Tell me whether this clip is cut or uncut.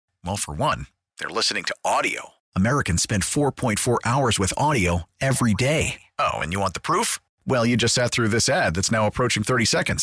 uncut